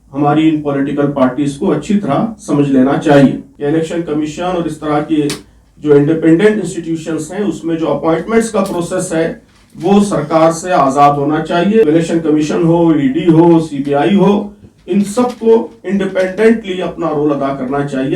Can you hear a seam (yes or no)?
yes